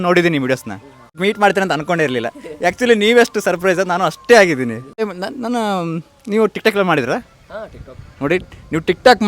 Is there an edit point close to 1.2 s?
yes; 2 cuts; at 1.2 s, 5.1 s

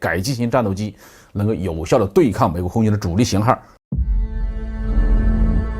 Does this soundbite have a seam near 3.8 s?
yes; 1 cut; at 3.8 s

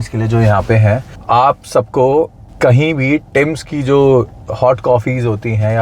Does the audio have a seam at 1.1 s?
yes; 2 cuts; at 1.1 s, 2.4 s

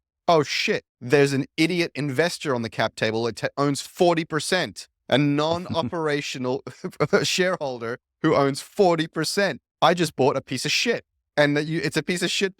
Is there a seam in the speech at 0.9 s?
yes; 3 cuts; at 0.9 s, 9.6 s, 11.1 s

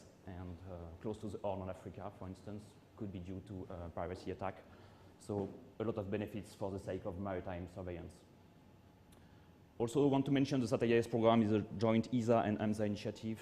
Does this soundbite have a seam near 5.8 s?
no; 1 cut; at 4.3 s

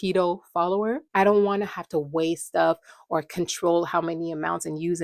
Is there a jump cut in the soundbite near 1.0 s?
yes; 1 cut; at 1.0 s

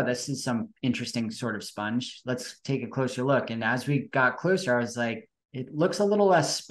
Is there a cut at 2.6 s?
no; 0 cuts

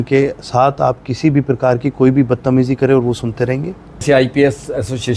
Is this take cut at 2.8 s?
no; 1 cut; at 4.0 s

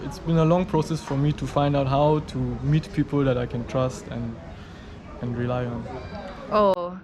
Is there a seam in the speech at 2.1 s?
no; 0 cuts

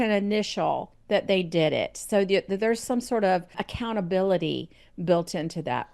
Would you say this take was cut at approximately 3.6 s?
yes; 1 cut; at 3.6 s

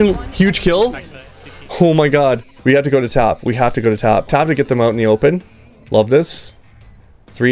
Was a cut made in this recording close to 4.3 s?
yes; 2 cuts; at 2.5 s, 4.3 s

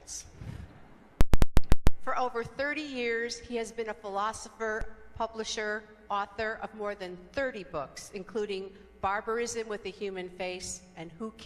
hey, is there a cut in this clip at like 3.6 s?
no; 0 cuts

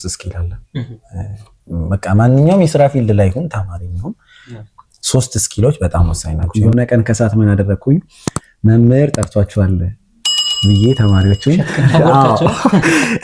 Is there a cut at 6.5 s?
yes; 1 cut; at 6.5 s

